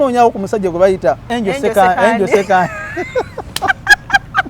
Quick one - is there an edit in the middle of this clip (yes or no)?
yes